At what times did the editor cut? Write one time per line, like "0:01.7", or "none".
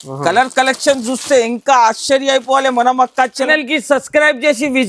0:03.5